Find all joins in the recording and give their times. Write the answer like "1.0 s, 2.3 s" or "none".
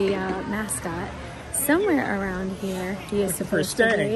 none